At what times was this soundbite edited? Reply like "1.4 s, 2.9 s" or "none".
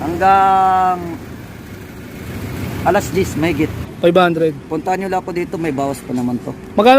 3.8 s